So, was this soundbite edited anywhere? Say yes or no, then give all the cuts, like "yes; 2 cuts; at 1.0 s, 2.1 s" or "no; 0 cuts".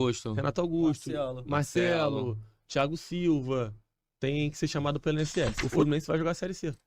yes; 1 cut; at 5.6 s